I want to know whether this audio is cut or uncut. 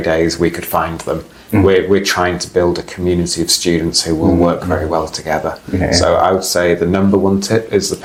uncut